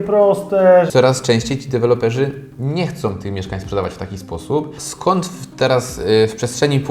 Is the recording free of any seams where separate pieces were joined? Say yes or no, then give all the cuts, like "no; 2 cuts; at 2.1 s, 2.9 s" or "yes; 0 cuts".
no; 2 cuts; at 0.9 s, 4.8 s